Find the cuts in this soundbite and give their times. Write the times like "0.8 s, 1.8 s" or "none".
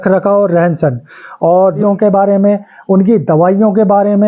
1.8 s